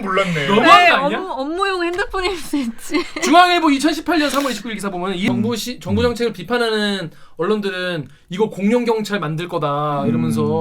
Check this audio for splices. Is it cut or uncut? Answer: cut